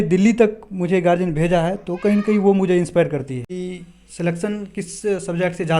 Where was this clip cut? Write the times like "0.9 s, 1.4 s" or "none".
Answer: 3.5 s